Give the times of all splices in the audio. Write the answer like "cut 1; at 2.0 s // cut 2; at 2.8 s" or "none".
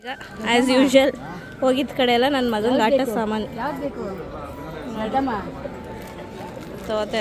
none